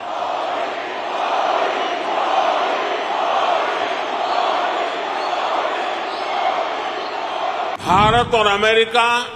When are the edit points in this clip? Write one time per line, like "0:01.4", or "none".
0:07.2

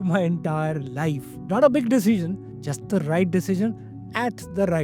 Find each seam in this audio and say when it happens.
none

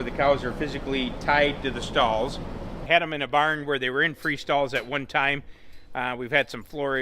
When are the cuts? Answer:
0:02.7

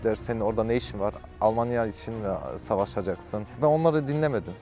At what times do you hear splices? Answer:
0:03.5

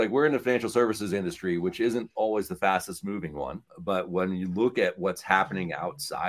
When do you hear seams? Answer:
none

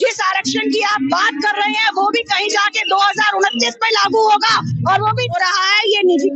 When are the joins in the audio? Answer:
0:05.4

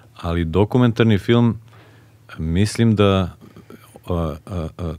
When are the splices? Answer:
none

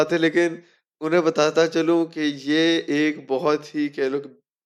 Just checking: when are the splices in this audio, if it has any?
none

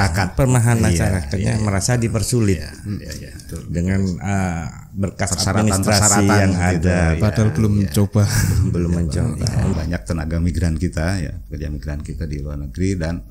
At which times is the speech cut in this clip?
0:09.7

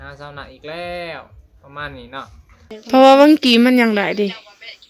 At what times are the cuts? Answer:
0:02.8

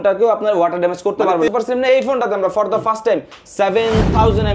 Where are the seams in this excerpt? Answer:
0:01.5

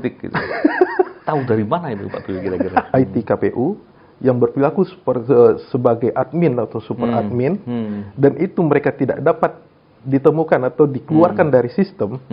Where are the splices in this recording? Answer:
0:02.9

